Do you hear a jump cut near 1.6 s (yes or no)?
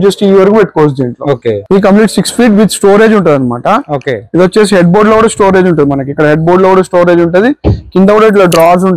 yes